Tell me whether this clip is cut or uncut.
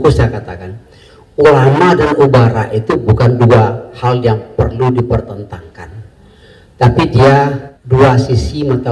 cut